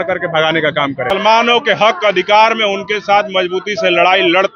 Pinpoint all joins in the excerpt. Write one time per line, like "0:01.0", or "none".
0:01.1